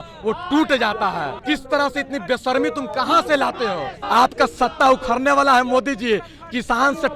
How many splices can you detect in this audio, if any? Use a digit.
2